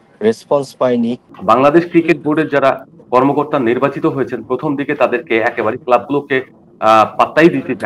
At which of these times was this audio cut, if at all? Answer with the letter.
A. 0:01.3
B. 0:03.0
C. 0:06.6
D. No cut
A